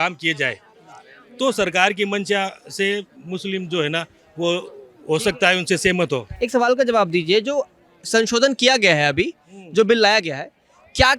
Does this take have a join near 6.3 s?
no; 0 cuts

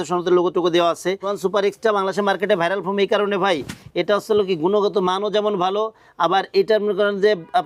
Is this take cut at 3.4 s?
no; 1 cut; at 1.3 s

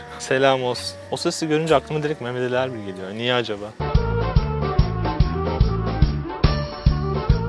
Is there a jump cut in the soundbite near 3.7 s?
no; 0 cuts

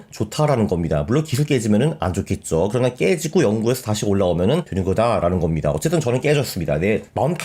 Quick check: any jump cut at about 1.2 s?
no; 1 cut; at 4.7 s

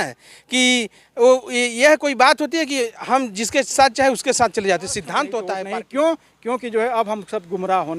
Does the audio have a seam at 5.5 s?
yes; 1 cut; at 5.5 s

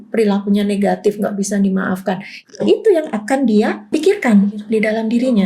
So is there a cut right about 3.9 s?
yes; 1 cut; at 3.9 s

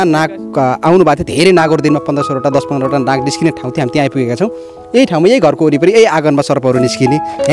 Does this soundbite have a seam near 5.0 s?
no; 0 cuts

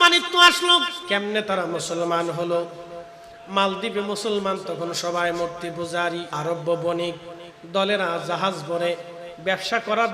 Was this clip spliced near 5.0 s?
no; 2 cuts; at 1.0 s, 6.3 s

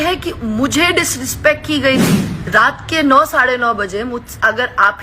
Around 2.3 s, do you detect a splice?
yes; 1 cut; at 2.3 s

